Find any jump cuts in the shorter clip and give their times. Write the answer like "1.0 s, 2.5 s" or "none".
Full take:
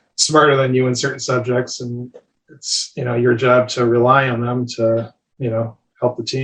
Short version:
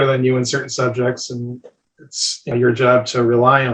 2.5 s